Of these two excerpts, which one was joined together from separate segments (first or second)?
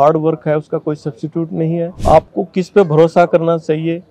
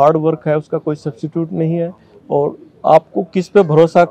first